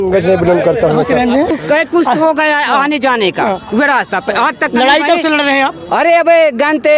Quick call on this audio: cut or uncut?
cut